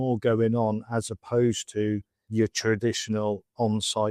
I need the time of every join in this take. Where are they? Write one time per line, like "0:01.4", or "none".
0:02.2